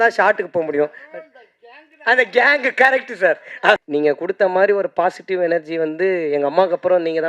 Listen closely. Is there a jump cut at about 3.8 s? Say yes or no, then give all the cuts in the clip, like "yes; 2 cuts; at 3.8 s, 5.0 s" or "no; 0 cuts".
yes; 1 cut; at 3.8 s